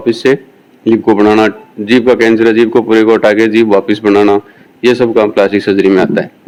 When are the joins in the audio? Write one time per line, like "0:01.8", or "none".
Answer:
none